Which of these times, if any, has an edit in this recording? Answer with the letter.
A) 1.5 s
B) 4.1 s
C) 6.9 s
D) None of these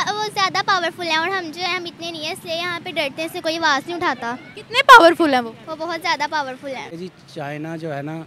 C